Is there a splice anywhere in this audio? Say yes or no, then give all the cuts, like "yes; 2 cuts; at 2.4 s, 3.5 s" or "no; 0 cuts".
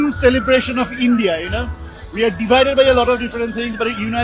no; 0 cuts